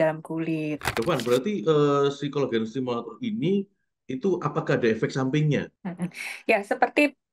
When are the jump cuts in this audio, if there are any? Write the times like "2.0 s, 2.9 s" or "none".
0.8 s, 5.8 s